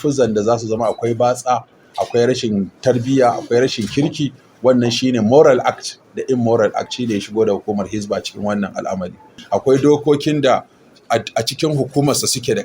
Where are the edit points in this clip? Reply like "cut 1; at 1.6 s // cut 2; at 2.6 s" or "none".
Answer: cut 1; at 9.4 s